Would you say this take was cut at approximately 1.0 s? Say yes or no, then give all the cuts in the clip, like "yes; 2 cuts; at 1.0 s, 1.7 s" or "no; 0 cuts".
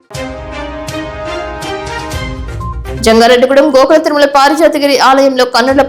no; 1 cut; at 2.8 s